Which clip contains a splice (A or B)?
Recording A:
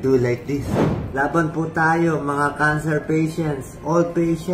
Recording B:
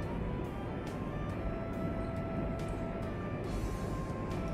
A